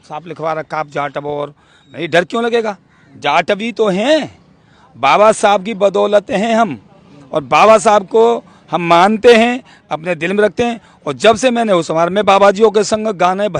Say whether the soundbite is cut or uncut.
uncut